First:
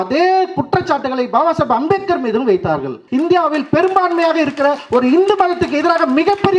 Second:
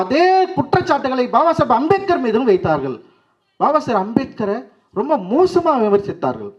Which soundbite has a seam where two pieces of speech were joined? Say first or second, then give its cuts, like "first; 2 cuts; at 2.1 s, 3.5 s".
first; 1 cut; at 3.0 s